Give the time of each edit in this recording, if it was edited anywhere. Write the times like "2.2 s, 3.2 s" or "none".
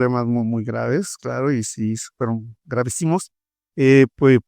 none